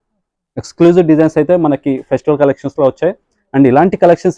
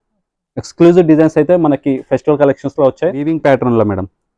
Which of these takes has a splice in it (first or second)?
second